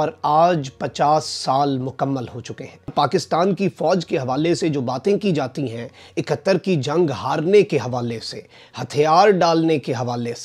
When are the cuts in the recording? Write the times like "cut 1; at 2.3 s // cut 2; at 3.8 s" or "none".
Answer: none